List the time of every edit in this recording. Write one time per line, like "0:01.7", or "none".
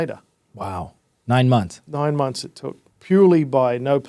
none